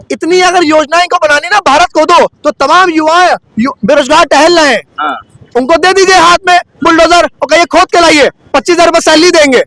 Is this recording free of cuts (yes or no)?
yes